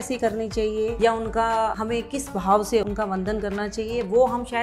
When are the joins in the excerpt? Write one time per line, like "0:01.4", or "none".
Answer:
0:00.9
0:01.8
0:02.8